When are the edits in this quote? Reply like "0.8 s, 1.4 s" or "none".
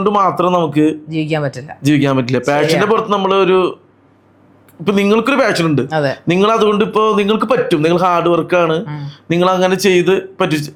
none